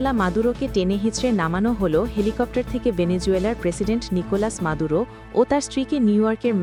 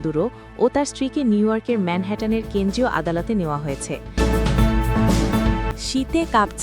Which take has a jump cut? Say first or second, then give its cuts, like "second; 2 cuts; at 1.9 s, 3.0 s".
second; 2 cuts; at 4.1 s, 5.7 s